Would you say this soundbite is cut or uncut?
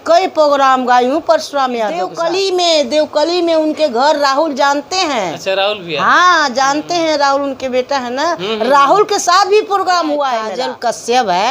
cut